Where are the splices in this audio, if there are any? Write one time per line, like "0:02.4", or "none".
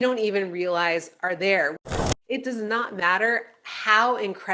0:02.1